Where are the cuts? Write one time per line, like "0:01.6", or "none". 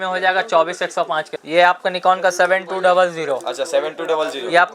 0:01.3